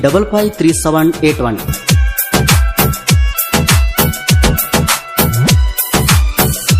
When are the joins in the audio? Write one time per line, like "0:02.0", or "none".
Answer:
0:01.7